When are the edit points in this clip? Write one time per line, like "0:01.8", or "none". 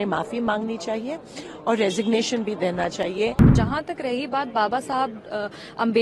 0:03.5